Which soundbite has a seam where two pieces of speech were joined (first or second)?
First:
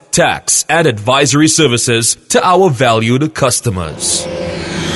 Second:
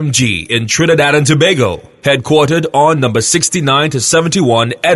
first